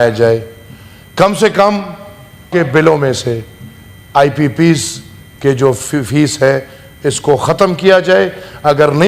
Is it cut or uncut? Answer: cut